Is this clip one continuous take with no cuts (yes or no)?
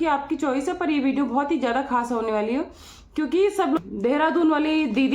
no